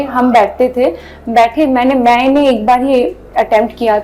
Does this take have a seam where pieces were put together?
no; 0 cuts

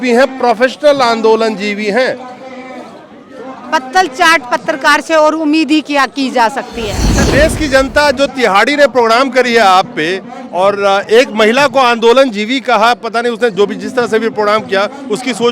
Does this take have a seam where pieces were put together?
yes; 1 cut; at 7.2 s

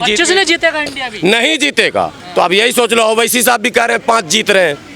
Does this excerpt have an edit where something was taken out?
no; 0 cuts

